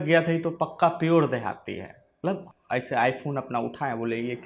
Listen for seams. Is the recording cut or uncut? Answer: cut